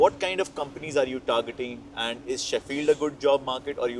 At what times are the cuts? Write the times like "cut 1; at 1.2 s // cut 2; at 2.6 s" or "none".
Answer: none

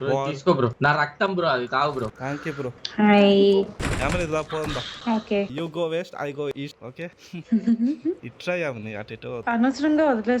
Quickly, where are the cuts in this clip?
cut 1; at 0.7 s // cut 2; at 2.2 s // cut 3; at 3.8 s // cut 4; at 4.9 s // cut 5; at 9.4 s

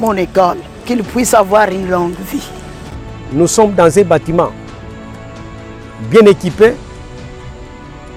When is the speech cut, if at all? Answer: none

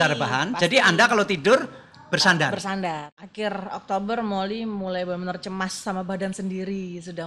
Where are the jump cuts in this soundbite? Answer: cut 1; at 3.1 s

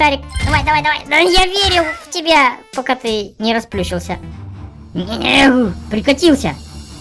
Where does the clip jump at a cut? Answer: cut 1; at 4.4 s

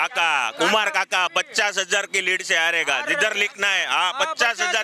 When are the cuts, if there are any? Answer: none

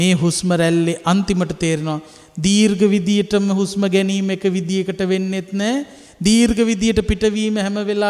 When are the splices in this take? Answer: none

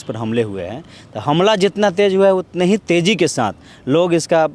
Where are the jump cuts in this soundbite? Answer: none

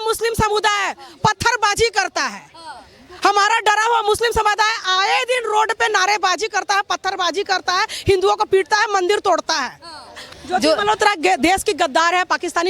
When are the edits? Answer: cut 1; at 10.2 s

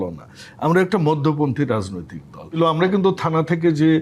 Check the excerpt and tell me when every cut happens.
cut 1; at 2.6 s

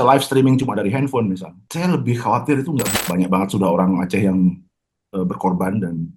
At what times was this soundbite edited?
cut 1; at 1.6 s // cut 2; at 2.9 s

